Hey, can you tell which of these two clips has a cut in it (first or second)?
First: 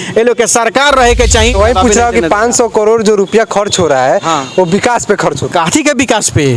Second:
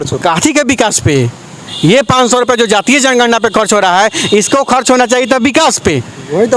first